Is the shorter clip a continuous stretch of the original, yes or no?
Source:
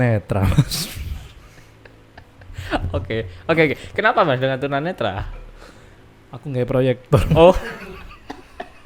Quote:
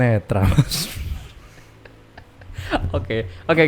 yes